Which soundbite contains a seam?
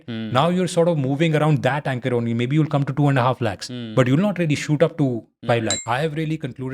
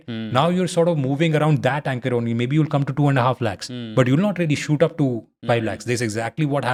first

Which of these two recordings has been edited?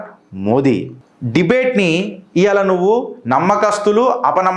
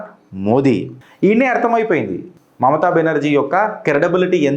second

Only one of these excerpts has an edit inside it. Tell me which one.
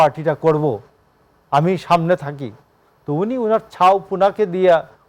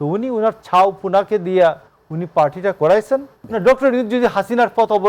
second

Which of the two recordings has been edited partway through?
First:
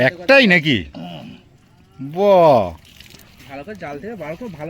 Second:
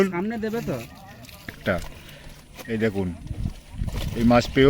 second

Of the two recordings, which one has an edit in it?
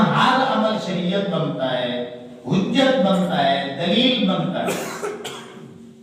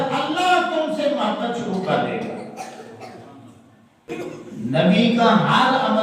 second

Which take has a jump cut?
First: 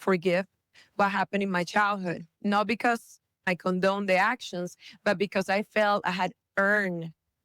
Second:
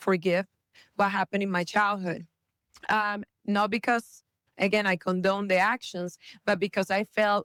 first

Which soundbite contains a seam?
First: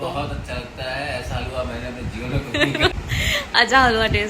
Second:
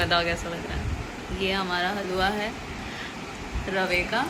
first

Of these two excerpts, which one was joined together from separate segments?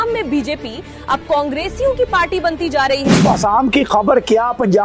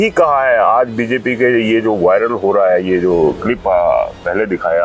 first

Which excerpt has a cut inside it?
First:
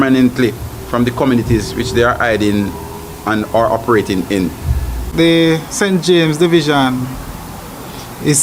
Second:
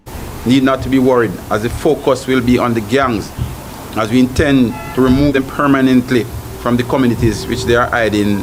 first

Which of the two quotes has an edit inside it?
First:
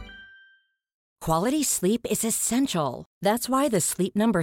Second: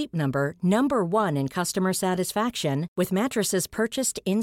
first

